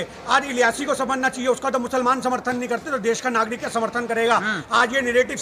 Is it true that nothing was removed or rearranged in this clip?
yes; 0 cuts

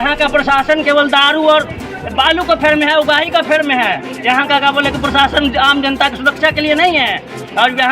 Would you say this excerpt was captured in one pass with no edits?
yes; 0 cuts

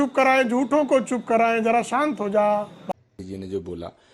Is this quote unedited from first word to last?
no; 1 cut; at 2.8 s

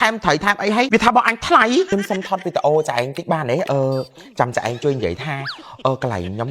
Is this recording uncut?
no; 2 cuts; at 0.9 s, 1.9 s

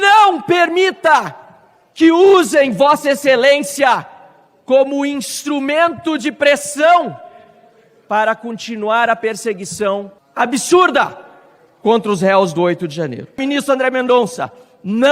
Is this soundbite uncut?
no; 2 cuts; at 10.2 s, 13.4 s

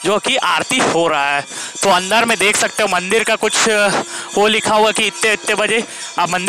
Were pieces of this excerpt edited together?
no; 0 cuts

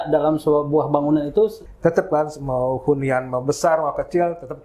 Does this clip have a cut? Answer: yes; 1 cut; at 1.7 s

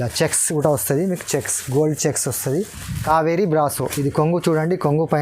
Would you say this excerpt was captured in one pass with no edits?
no; 1 cut; at 2.8 s

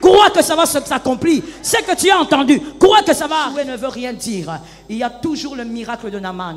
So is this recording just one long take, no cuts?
no; 1 cut; at 3.4 s

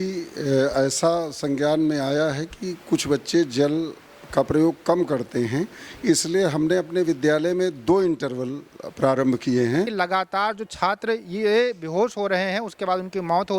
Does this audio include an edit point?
yes; 1 cut; at 9.9 s

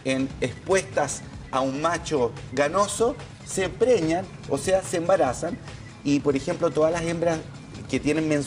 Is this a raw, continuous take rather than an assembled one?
no; 1 cut; at 4.9 s

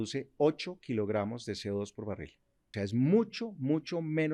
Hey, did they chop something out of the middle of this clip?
yes; 1 cut; at 2.6 s

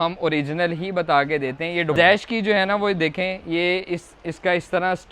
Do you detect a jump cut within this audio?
yes; 1 cut; at 1.9 s

